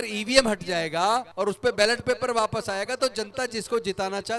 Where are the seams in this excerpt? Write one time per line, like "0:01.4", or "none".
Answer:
0:01.3